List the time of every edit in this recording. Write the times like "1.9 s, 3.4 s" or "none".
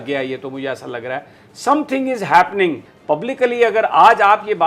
2.9 s